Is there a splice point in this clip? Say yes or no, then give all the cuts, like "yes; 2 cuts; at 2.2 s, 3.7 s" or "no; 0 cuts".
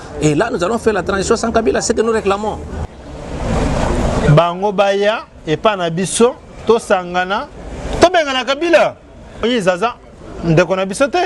yes; 2 cuts; at 2.8 s, 9.4 s